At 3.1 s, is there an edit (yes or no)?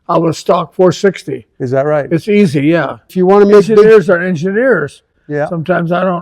yes